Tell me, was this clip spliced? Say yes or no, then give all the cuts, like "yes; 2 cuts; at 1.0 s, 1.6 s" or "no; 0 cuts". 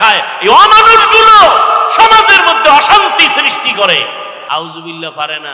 yes; 1 cut; at 4.4 s